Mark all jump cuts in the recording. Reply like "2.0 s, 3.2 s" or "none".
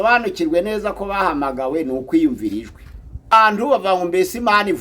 3.3 s